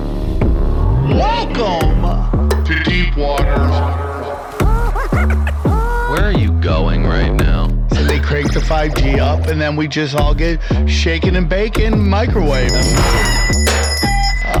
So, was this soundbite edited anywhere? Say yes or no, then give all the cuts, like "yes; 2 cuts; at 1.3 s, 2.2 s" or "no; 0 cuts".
no; 0 cuts